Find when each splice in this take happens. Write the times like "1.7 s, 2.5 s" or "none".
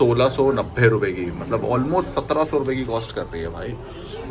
none